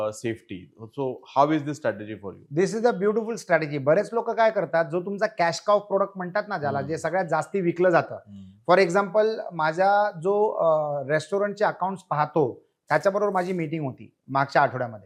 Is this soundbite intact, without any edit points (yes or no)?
yes